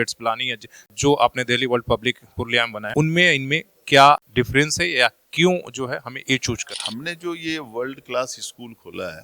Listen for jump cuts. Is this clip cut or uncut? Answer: cut